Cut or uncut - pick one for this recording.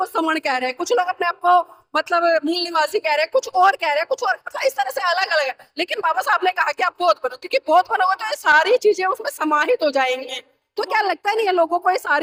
uncut